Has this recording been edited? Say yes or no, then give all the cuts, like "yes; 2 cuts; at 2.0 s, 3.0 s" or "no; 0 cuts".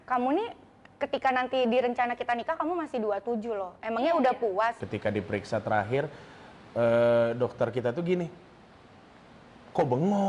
yes; 1 cut; at 4.8 s